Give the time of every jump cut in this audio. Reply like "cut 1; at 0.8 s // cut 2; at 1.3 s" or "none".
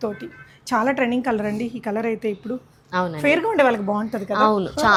none

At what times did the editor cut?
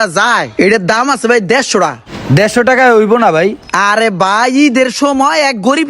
none

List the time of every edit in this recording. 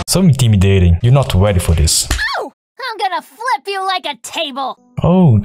cut 1; at 1.0 s // cut 2; at 4.7 s

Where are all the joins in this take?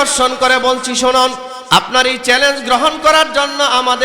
cut 1; at 1.5 s

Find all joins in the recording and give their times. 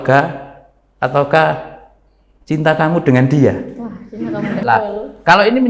cut 1; at 4.6 s

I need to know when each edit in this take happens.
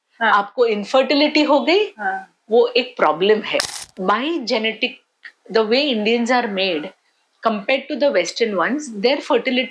cut 1; at 3.8 s

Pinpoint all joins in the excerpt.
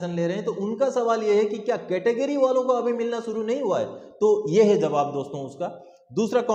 none

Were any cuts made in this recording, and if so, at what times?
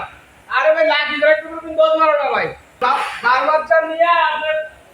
cut 1; at 2.8 s

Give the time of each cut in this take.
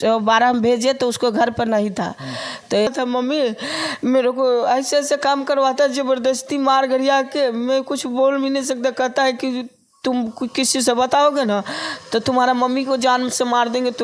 cut 1; at 2.9 s

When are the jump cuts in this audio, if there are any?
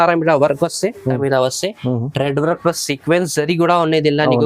cut 1; at 1.2 s

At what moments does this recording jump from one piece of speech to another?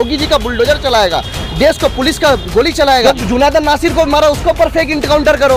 cut 1; at 3.0 s

